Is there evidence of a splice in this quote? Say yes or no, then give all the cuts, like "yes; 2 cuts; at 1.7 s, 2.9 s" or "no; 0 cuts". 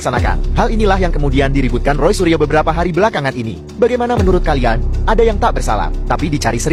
no; 0 cuts